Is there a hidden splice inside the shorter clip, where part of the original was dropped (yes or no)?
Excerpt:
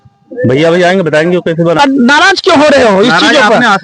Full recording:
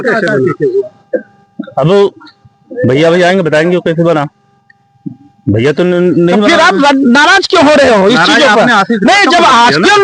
yes